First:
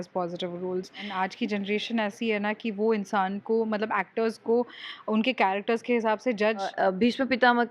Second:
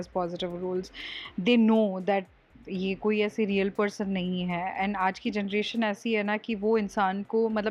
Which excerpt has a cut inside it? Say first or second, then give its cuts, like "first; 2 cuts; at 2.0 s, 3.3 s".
first; 2 cuts; at 1.1 s, 6.7 s